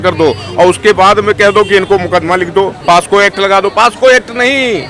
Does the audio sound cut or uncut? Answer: cut